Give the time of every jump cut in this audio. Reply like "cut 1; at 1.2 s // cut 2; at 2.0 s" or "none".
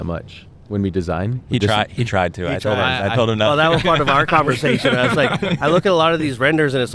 none